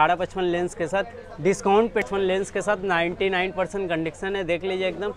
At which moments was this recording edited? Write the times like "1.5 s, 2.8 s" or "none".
2.0 s